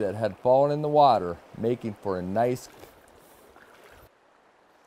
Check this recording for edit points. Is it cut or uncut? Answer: cut